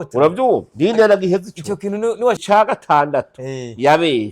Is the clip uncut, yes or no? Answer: no